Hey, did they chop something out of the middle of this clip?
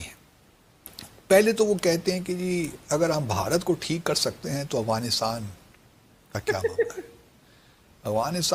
no; 0 cuts

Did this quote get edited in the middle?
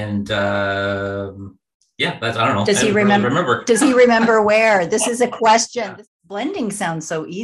yes; 1 cut; at 6.1 s

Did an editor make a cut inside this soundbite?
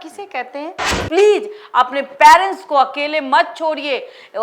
yes; 1 cut; at 1.0 s

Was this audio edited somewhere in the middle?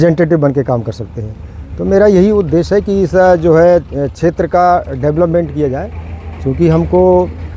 no; 0 cuts

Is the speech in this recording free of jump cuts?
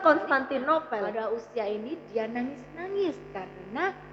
no; 1 cut; at 1.1 s

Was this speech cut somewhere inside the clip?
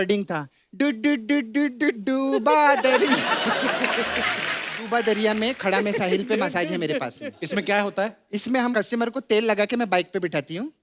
yes; 1 cut; at 4.9 s

